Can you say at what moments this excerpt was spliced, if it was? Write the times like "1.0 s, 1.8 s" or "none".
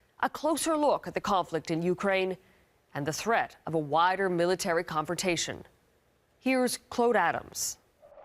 5.5 s